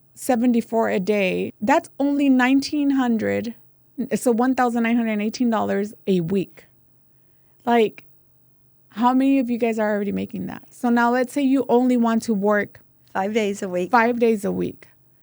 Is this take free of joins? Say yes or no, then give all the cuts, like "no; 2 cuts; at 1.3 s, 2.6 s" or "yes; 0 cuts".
no; 1 cut; at 1.5 s